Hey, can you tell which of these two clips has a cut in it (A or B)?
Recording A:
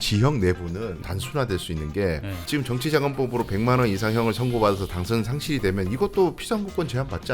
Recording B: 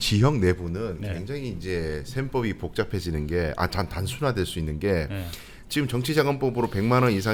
A